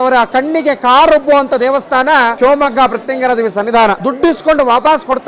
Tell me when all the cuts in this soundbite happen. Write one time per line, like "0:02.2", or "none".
0:02.3
0:04.0